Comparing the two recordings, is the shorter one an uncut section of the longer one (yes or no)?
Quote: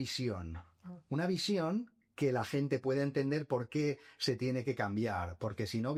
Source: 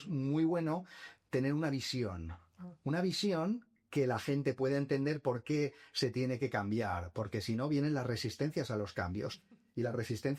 yes